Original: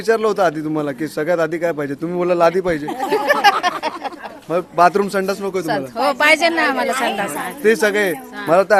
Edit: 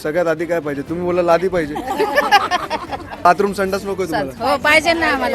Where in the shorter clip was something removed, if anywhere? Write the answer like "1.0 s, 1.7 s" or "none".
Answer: 3.2 s